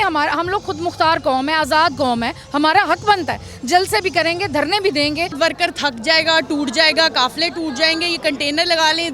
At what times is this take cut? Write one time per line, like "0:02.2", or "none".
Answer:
0:05.3